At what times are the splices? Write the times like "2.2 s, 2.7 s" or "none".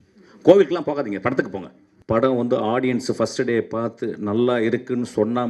1.9 s